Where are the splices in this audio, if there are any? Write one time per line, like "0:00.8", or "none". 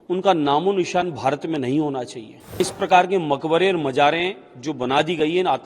0:02.6